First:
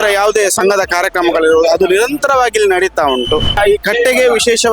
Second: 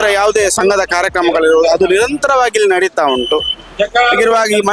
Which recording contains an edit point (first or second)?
first